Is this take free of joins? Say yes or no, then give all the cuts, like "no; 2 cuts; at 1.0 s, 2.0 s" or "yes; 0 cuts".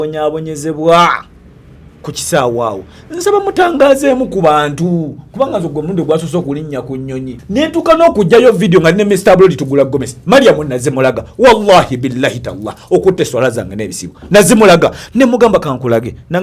no; 1 cut; at 7.4 s